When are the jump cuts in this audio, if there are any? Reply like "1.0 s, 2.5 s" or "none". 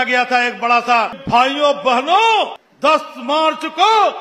1.2 s, 2.6 s